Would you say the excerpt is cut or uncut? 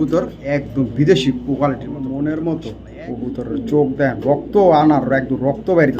cut